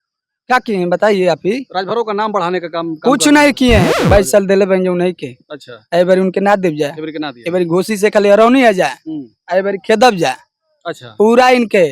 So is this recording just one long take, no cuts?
no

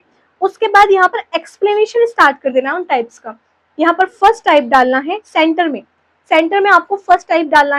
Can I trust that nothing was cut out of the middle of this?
yes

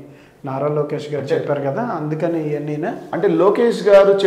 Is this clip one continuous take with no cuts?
yes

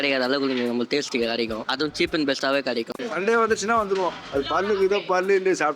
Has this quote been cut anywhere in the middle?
yes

